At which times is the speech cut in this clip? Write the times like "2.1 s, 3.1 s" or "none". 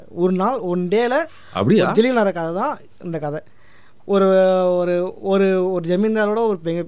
none